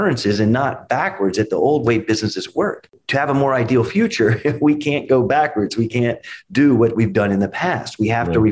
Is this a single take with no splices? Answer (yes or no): no